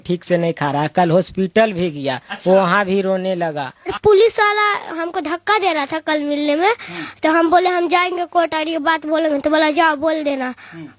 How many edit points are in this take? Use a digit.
1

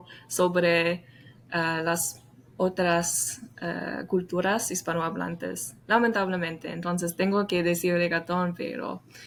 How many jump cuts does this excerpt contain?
0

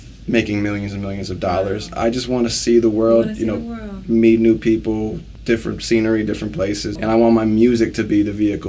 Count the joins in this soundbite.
2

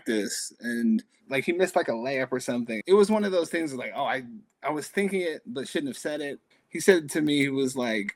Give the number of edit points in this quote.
3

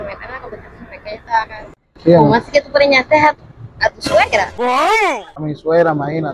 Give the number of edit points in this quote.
0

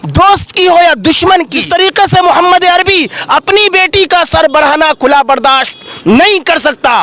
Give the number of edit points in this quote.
1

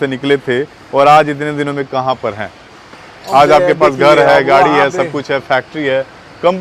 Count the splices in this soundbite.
0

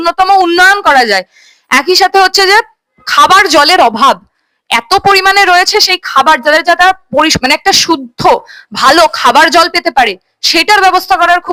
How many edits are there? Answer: 0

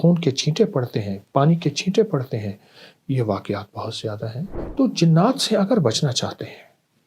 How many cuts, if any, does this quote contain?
1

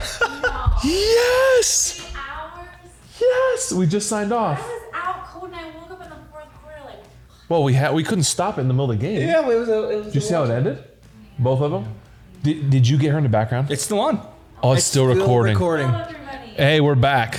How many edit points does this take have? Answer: 0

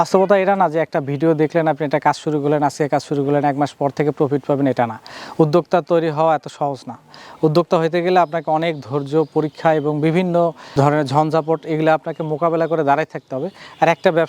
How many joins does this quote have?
0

